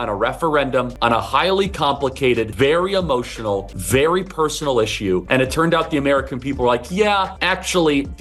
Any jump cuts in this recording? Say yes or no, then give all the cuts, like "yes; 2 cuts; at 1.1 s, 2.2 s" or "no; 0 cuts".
yes; 5 cuts; at 1.2 s, 2.5 s, 3.7 s, 5.2 s, 7.4 s